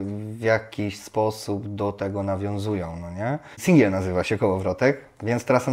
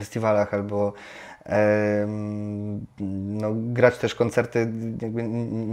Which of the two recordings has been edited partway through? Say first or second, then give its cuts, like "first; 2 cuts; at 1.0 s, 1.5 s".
first; 1 cut; at 3.6 s